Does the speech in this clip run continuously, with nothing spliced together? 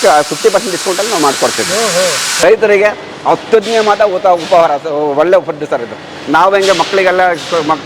no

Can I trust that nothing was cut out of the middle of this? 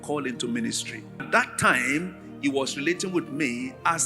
no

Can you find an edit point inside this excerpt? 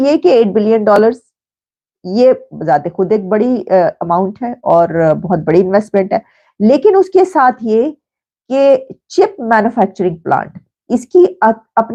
no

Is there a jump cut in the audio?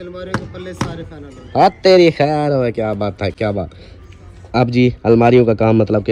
no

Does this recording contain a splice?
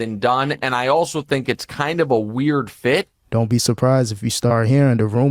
yes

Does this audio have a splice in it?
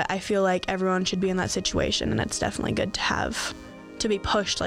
no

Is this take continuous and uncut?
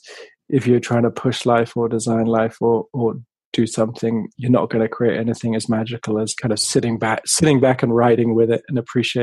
no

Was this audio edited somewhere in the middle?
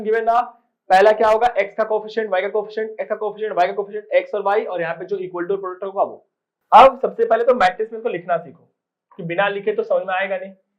yes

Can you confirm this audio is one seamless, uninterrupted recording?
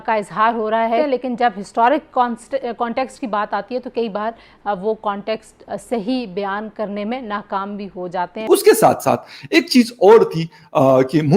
no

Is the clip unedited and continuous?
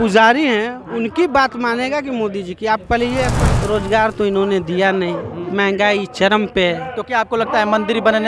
no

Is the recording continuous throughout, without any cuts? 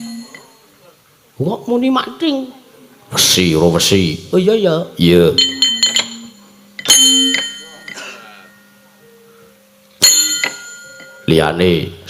yes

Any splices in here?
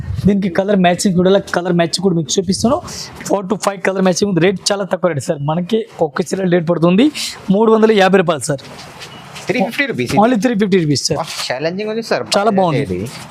no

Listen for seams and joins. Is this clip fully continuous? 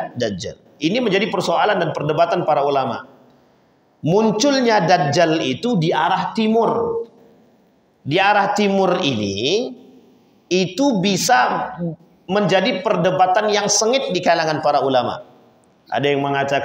yes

